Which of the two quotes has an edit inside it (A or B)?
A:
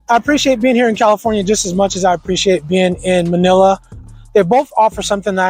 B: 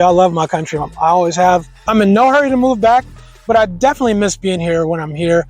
B